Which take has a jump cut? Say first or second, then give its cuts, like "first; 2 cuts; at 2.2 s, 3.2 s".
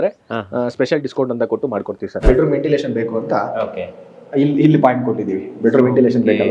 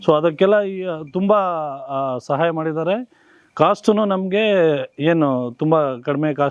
first; 1 cut; at 2.2 s